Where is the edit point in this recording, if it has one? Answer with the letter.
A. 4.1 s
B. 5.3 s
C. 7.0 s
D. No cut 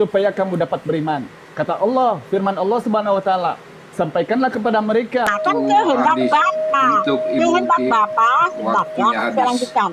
B